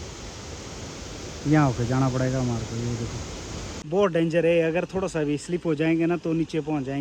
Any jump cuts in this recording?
yes; 1 cut; at 3.8 s

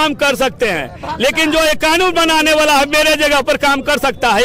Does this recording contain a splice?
no; 0 cuts

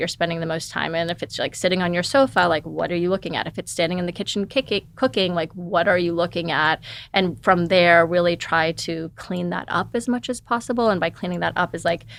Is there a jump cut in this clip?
no; 0 cuts

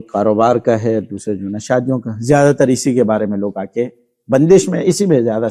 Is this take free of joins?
yes; 0 cuts

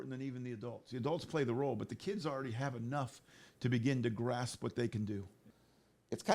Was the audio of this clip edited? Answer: yes; 1 cut; at 5.4 s

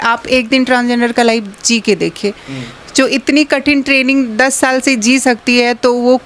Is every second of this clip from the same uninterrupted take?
yes; 0 cuts

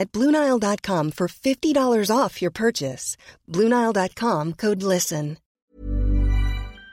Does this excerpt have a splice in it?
yes; 1 cut; at 5.4 s

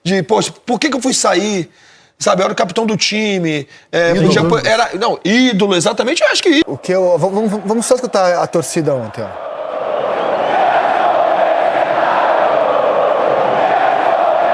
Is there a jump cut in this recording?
yes; 1 cut; at 6.6 s

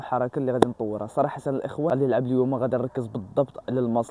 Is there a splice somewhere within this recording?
no; 0 cuts

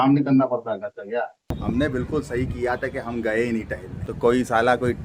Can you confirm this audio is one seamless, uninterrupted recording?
no; 2 cuts; at 1.6 s, 4.0 s

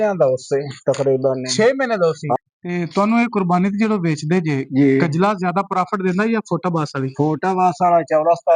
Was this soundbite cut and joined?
yes; 1 cut; at 2.4 s

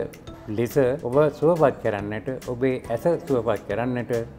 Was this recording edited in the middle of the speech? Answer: yes; 1 cut; at 1.0 s

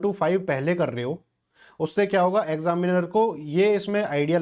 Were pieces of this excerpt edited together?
no; 0 cuts

